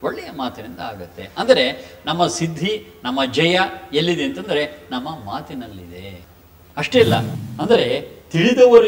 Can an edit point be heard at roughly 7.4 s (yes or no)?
yes